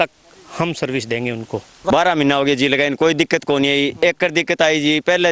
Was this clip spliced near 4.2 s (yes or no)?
no